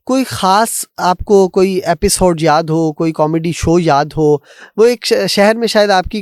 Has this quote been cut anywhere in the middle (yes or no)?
no